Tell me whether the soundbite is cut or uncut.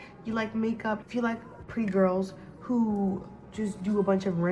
cut